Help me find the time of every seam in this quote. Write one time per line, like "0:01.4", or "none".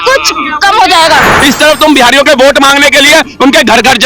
0:01.3

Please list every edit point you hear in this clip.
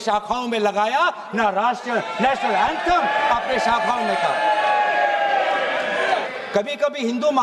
0:06.1

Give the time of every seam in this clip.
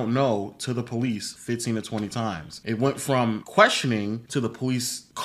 none

